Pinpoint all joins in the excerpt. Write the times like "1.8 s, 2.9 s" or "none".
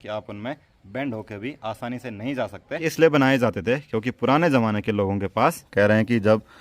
2.8 s, 5.6 s